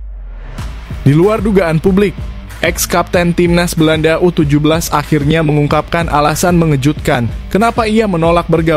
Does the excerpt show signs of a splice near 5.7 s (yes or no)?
no